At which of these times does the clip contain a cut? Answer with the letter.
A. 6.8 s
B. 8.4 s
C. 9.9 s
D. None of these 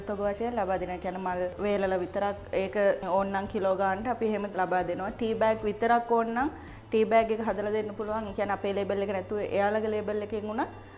D